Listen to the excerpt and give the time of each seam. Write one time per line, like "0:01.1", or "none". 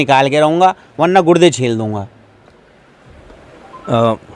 none